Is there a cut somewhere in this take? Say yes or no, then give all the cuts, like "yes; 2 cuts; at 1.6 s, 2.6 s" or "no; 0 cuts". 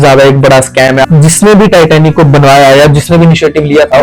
yes; 1 cut; at 1.0 s